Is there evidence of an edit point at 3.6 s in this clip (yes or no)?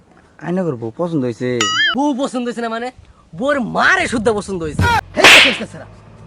no